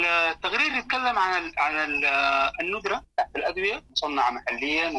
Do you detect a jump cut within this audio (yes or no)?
yes